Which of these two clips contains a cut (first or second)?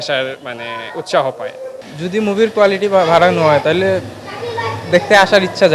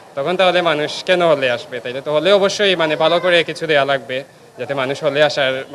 first